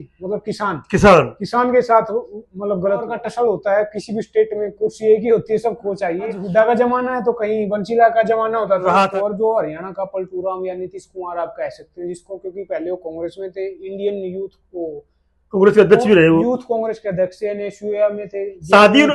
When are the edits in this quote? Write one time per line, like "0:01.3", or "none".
0:03.2
0:06.4
0:09.0